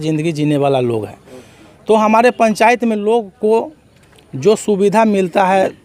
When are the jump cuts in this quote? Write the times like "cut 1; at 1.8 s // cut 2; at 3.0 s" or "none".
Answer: none